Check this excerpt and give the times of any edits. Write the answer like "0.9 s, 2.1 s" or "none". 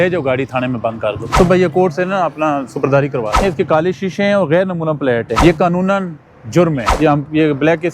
1.2 s, 3.4 s, 5.3 s, 6.9 s